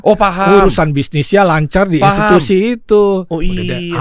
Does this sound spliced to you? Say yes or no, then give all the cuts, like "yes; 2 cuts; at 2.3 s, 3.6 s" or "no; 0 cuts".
no; 0 cuts